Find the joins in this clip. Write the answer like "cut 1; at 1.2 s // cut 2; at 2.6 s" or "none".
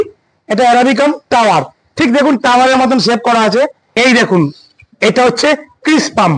cut 1; at 3.8 s